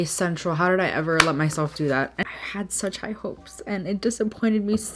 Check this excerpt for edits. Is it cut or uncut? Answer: cut